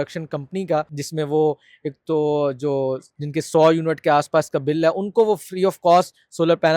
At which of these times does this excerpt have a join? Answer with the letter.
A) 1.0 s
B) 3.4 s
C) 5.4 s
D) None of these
A